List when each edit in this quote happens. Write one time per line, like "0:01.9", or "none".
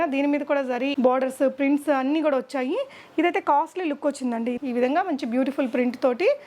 0:00.9
0:04.6